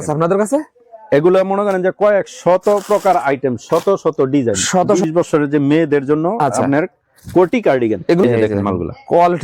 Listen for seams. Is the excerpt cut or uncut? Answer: cut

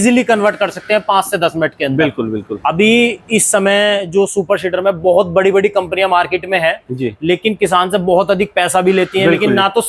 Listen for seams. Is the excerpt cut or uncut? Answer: uncut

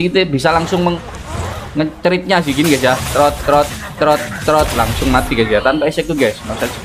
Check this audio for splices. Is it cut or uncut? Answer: uncut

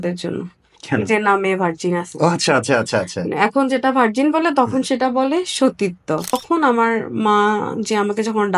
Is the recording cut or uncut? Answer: cut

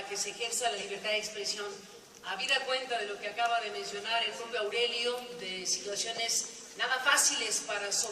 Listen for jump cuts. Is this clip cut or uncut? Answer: uncut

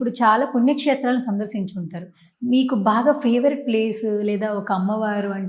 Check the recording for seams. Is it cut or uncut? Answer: uncut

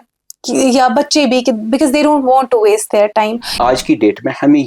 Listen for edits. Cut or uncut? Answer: cut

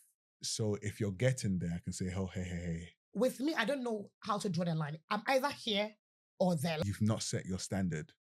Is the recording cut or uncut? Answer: cut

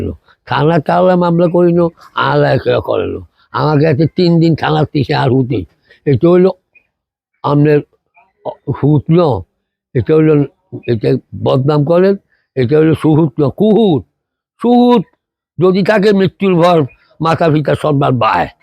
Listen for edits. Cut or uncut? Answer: uncut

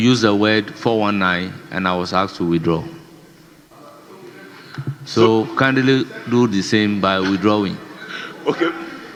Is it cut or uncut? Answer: uncut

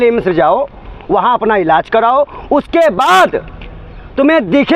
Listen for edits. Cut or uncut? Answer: uncut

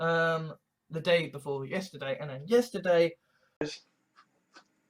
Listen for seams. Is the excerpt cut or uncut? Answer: cut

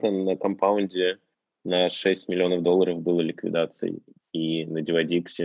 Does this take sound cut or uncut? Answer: uncut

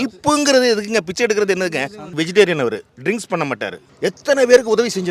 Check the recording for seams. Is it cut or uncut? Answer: cut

